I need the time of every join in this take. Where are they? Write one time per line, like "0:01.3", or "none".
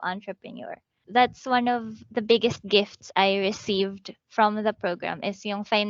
0:01.0